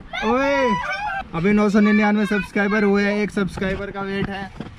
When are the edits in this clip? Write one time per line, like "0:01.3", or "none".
0:01.2

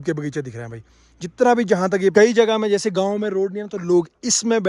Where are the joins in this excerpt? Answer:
0:02.1

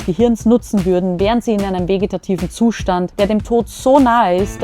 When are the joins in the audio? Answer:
0:03.1

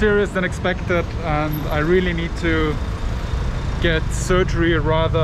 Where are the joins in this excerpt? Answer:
none

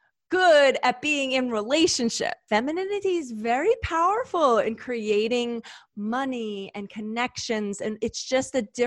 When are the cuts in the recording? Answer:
0:02.4

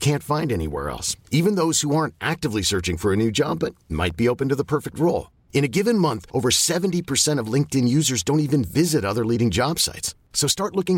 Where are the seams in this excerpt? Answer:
none

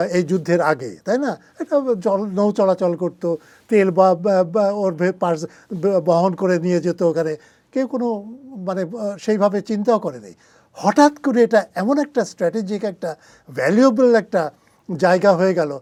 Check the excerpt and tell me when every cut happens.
none

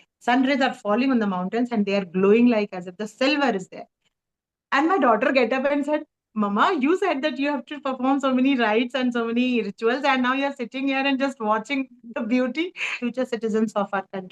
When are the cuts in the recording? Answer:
0:12.9

